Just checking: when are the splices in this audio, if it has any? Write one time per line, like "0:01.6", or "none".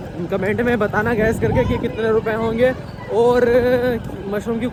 none